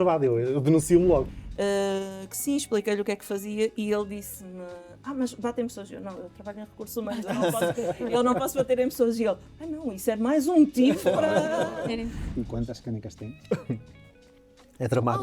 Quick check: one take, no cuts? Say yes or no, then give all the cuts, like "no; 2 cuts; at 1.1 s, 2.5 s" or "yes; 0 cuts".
no; 2 cuts; at 1.3 s, 12.2 s